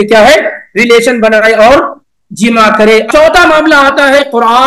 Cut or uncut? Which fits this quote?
cut